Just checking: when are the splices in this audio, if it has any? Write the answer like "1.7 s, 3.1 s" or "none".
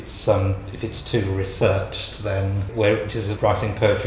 2.6 s, 3.3 s